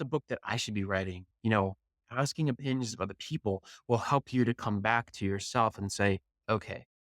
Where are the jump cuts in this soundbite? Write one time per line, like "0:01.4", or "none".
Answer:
0:01.2